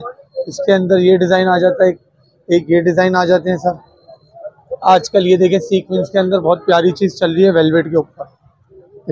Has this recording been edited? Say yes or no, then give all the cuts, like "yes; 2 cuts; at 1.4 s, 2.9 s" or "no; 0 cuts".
no; 0 cuts